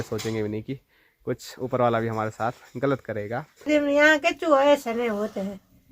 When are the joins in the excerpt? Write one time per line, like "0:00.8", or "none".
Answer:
0:03.7